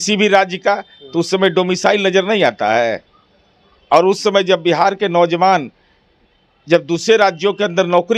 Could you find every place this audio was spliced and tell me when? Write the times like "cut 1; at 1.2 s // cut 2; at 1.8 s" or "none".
none